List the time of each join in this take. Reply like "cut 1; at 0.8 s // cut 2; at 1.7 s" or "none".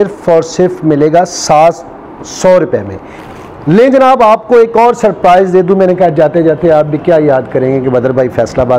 cut 1; at 3.2 s